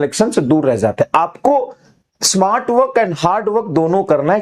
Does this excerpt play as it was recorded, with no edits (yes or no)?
yes